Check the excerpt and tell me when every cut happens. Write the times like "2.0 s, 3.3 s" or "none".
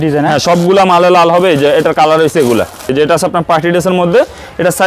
2.9 s

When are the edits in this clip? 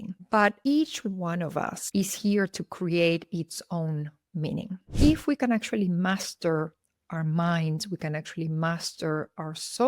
4.9 s

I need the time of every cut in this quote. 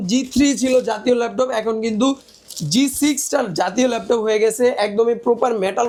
none

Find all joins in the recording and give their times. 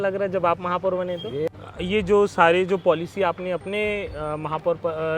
1.5 s

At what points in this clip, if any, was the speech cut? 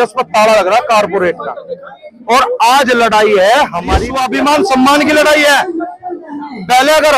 4.1 s

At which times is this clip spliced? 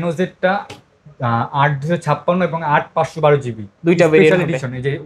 none

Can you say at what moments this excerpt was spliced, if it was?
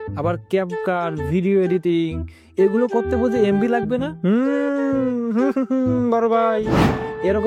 4.1 s

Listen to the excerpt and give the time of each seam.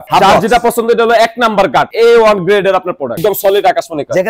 1.9 s, 3.2 s

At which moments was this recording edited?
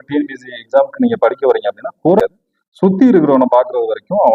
2.2 s

